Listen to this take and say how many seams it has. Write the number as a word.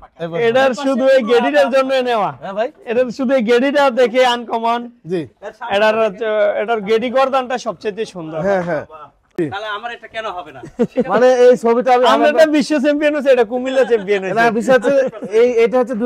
one